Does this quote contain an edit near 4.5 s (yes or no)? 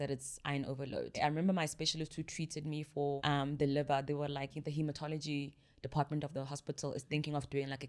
yes